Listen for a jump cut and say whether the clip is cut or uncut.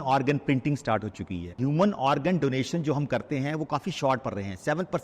cut